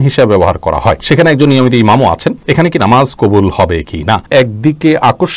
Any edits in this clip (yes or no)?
yes